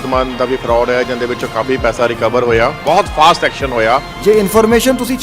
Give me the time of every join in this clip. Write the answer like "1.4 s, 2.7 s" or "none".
2.8 s, 4.1 s